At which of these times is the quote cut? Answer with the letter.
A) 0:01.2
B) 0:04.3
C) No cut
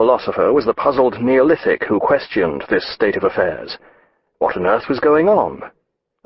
A